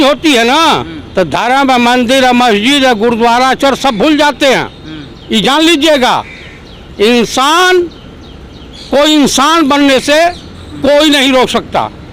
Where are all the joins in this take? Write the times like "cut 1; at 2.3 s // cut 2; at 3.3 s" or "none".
none